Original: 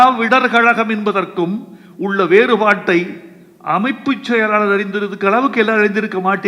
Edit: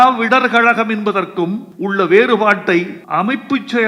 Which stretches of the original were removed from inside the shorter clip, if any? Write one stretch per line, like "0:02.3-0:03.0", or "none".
0:01.7-0:01.9
0:03.2-0:03.5